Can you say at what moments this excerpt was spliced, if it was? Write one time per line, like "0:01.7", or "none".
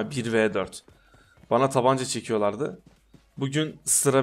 none